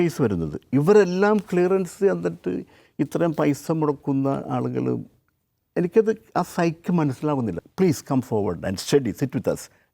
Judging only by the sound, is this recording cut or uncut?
cut